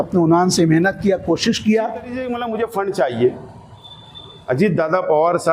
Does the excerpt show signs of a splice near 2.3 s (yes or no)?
yes